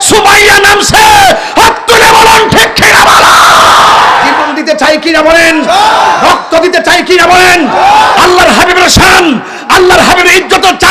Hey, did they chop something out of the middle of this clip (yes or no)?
yes